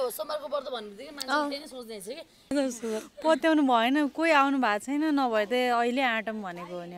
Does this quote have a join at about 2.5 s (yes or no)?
yes